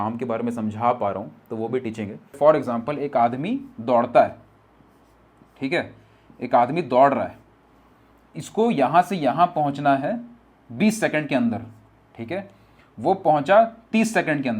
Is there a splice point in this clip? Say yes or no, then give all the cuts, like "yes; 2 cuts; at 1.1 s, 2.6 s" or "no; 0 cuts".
yes; 1 cut; at 2.3 s